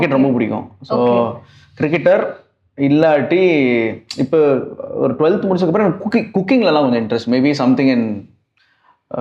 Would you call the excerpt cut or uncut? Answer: uncut